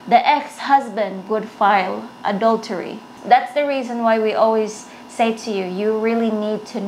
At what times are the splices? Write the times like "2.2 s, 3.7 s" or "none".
3.1 s